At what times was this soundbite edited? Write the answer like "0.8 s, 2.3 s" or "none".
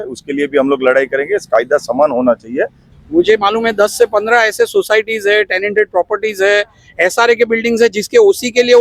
2.8 s